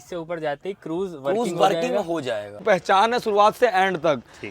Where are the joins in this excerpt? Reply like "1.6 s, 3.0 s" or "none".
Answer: 2.6 s